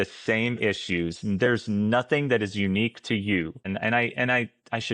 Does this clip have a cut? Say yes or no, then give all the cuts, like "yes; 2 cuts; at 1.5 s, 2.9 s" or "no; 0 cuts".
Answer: yes; 1 cut; at 3.6 s